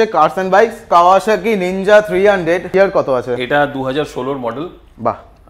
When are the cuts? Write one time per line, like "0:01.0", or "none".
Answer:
0:00.9
0:02.7